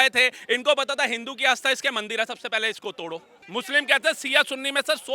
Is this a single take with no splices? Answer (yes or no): no